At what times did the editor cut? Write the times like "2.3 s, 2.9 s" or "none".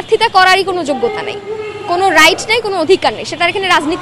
none